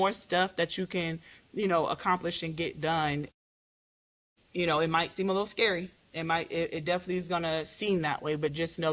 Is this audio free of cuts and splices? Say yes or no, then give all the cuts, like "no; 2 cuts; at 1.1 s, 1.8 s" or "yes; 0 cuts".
yes; 0 cuts